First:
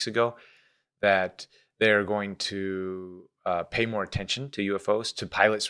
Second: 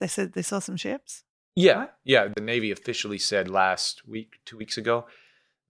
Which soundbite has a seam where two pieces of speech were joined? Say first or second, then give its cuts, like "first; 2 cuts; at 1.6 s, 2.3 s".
second; 1 cut; at 2.3 s